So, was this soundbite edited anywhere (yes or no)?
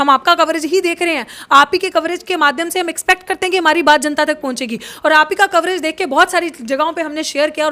no